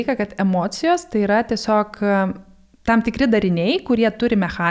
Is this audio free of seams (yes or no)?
yes